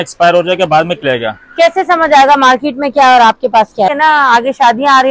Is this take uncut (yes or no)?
no